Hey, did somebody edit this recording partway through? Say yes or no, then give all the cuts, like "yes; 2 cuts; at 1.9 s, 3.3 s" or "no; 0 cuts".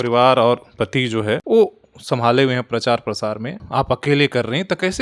yes; 2 cuts; at 1.4 s, 3.6 s